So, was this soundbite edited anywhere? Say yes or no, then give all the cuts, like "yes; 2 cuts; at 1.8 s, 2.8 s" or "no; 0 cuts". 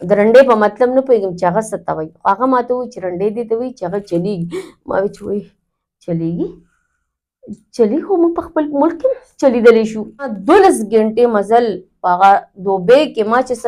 yes; 1 cut; at 10.4 s